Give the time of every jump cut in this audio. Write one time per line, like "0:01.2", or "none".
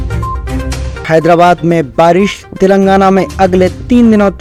none